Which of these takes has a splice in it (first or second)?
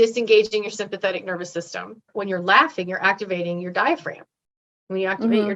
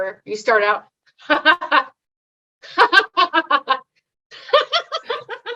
first